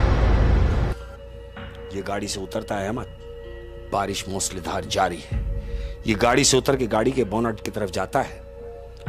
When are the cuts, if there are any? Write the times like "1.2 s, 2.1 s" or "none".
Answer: 0.9 s

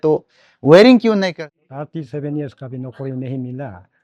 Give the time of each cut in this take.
1.3 s

